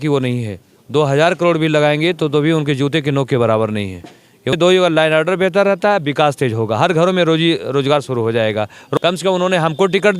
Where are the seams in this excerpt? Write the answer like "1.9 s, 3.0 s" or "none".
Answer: 4.5 s, 8.9 s